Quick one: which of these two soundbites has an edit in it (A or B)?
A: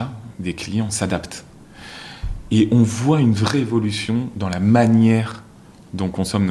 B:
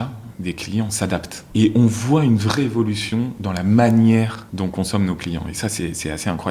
B